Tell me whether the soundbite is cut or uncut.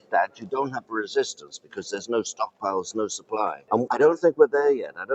cut